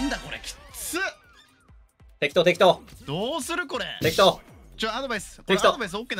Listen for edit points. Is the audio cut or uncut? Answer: uncut